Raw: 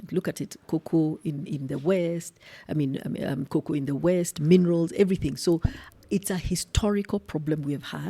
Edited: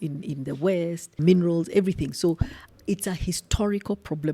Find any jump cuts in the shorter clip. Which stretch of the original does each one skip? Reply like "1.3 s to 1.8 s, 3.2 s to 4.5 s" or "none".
2.3 s to 4.3 s